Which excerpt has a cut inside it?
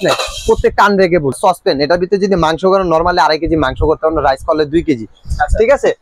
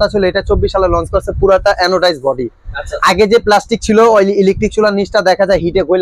first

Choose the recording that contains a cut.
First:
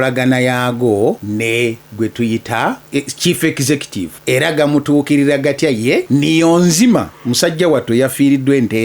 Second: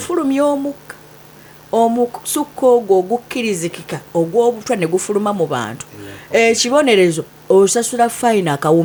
first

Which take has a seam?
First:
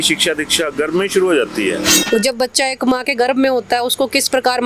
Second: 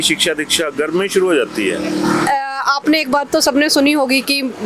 first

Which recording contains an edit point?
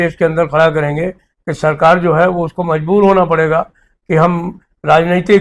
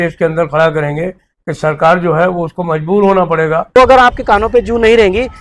second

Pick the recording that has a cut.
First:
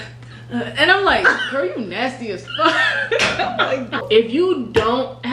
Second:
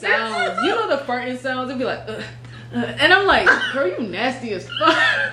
first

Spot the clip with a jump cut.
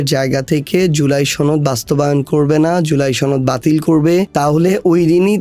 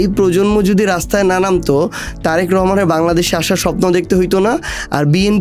first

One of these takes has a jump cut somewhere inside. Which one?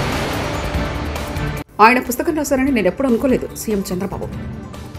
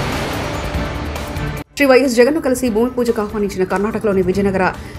second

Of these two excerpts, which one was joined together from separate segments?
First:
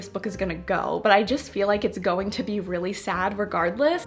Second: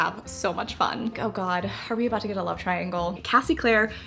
second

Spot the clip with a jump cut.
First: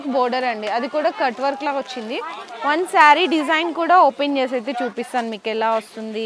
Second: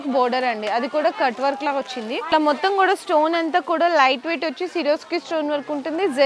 second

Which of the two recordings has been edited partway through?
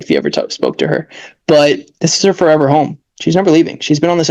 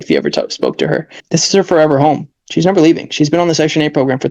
second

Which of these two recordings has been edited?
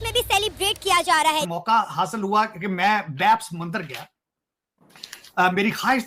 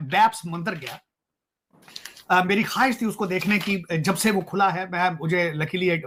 first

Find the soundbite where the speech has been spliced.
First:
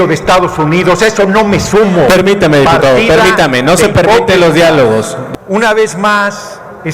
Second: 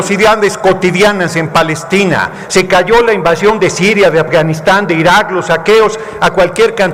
first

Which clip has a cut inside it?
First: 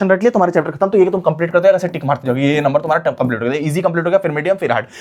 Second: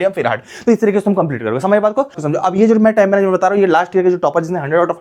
second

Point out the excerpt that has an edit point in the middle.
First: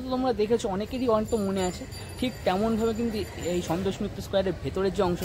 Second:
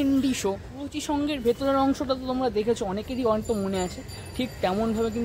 second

